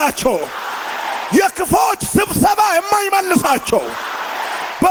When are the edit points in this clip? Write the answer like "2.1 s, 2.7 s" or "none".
none